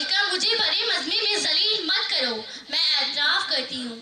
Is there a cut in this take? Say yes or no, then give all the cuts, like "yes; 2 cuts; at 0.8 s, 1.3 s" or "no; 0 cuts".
no; 0 cuts